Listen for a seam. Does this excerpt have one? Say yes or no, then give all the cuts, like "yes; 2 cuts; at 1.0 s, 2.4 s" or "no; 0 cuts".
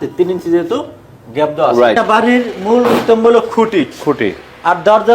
yes; 1 cut; at 2.0 s